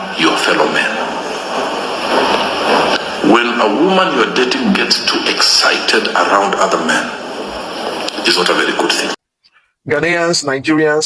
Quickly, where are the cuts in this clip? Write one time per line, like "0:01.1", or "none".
0:09.2